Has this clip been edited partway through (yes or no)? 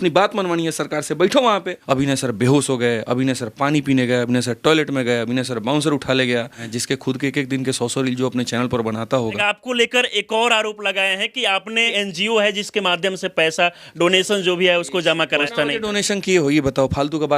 yes